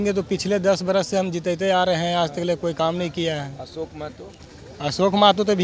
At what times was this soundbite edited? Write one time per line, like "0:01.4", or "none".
none

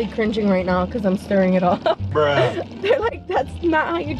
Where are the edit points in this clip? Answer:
none

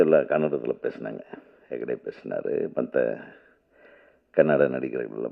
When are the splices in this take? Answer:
none

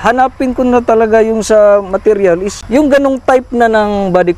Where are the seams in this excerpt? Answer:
0:02.5

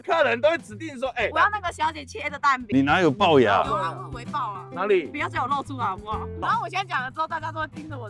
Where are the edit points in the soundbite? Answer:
0:02.7
0:06.4

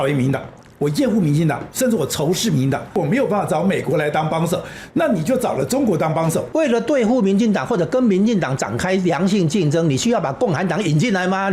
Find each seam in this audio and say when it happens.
0:03.0
0:06.5

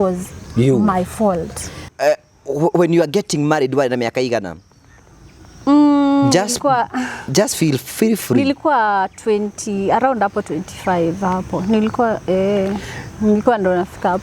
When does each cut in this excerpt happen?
0:01.8

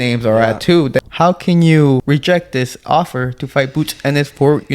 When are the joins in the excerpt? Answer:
0:01.0
0:02.0

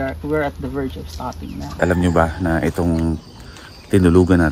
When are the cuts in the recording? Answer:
0:01.6

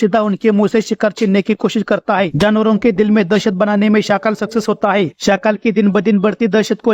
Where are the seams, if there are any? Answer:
0:02.3
0:05.2

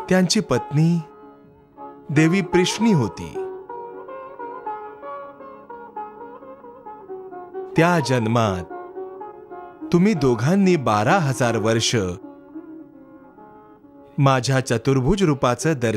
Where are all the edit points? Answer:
none

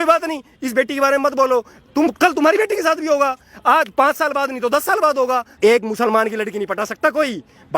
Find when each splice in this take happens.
0:05.6

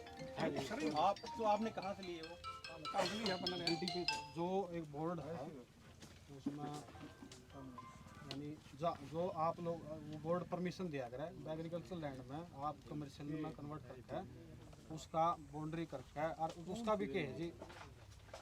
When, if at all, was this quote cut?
none

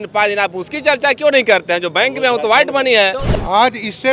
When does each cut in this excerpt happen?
0:03.2

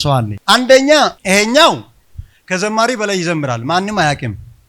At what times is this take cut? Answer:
0:01.2

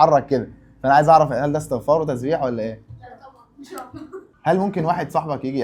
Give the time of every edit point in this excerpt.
0:04.3

